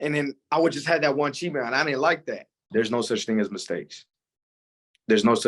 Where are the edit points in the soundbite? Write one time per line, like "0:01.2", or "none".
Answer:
0:02.6